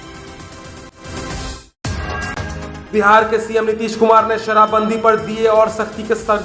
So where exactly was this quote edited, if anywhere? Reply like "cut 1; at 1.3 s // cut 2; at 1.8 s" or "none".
cut 1; at 0.9 s // cut 2; at 2.5 s